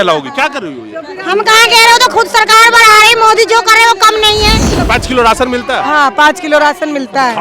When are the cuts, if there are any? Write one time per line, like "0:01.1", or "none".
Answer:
0:04.8